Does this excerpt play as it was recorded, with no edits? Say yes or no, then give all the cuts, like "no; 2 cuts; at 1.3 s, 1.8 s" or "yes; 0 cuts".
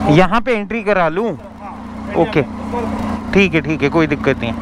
yes; 0 cuts